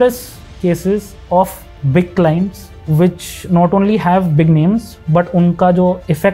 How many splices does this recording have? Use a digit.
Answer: 0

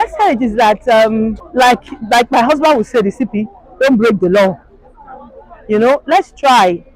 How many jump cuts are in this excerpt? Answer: 1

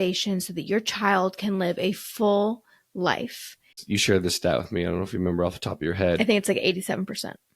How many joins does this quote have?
1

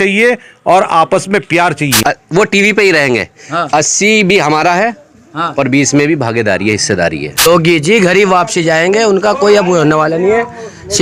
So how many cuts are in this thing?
2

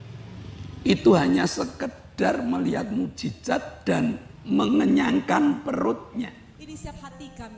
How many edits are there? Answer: 1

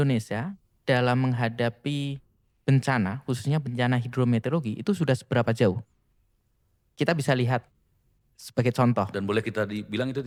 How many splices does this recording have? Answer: 0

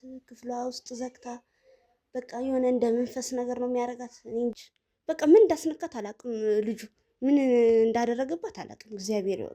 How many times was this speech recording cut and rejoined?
1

